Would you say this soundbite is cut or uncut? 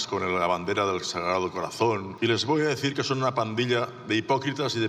cut